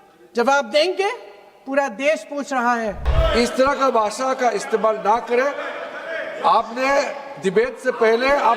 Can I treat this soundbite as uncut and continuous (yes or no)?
no